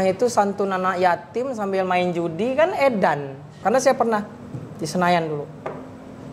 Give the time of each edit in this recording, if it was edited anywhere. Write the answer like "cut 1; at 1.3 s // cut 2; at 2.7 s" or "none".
cut 1; at 3.6 s